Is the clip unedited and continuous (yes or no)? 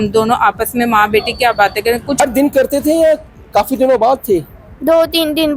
no